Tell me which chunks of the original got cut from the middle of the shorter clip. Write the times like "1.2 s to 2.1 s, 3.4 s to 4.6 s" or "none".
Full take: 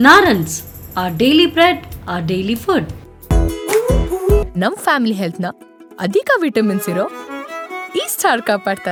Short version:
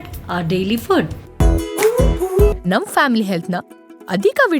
3.0 s to 3.1 s

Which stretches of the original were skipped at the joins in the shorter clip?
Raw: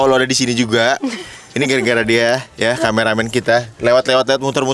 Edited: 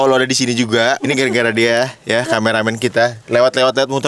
1.0 s to 1.5 s

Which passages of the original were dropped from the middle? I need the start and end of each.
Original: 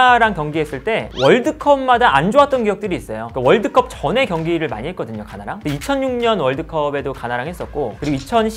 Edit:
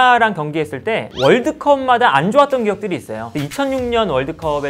3.2 s to 5.5 s

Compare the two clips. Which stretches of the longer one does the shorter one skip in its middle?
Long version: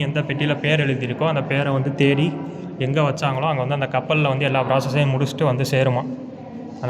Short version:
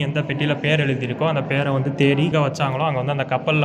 2.3 s to 2.9 s

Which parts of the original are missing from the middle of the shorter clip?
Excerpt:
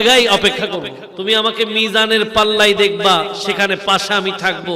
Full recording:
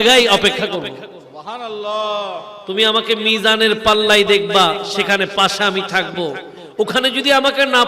1.0 s to 2.5 s

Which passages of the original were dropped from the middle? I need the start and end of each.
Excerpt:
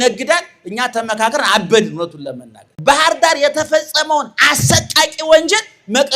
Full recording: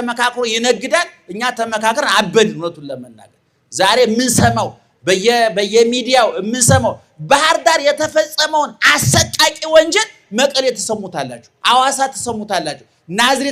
3.3 s to 7.1 s

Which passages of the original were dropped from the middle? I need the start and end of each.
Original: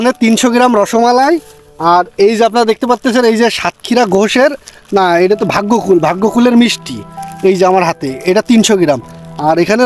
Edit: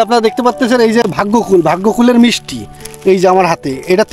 3.5 s to 5.5 s

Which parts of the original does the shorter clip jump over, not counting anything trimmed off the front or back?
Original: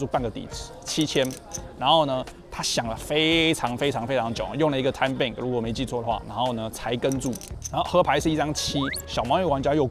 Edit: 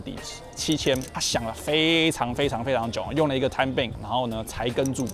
1.4 s to 2.6 s, 5.4 s to 6.2 s

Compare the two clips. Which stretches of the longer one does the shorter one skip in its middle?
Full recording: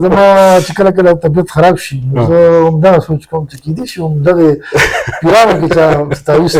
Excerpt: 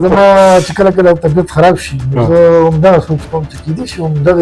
none

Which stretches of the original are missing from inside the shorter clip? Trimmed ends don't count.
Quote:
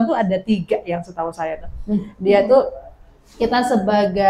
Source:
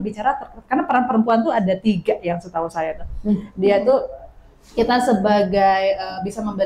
none

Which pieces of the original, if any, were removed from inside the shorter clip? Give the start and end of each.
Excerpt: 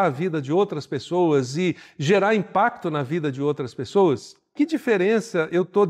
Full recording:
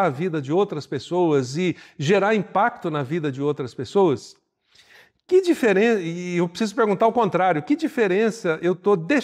4.5 s to 7.6 s

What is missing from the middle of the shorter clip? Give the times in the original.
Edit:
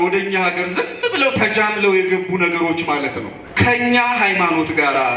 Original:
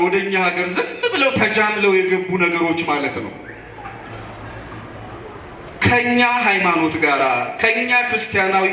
3.4 s to 5.6 s

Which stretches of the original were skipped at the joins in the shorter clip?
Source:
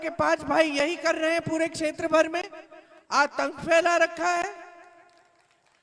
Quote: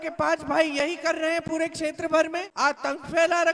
2.4 s to 3.0 s

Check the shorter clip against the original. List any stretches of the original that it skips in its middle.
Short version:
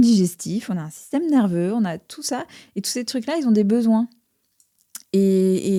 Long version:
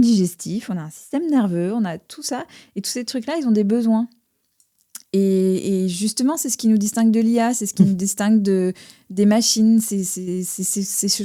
none

